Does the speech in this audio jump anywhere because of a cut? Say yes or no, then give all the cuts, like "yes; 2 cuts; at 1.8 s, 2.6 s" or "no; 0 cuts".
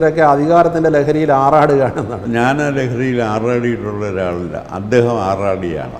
yes; 1 cut; at 2.2 s